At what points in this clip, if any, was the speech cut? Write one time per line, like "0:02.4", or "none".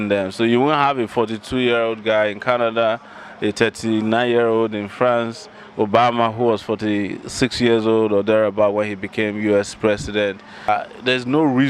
0:10.7